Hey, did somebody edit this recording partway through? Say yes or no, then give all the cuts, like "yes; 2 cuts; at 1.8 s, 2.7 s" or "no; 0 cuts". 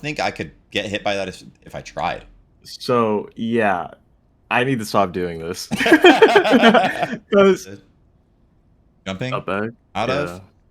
yes; 1 cut; at 7.8 s